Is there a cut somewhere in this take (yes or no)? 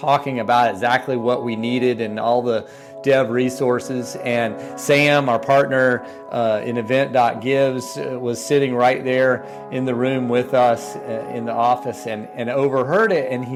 no